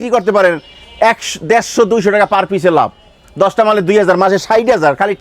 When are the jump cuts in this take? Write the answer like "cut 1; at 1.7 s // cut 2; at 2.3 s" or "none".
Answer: none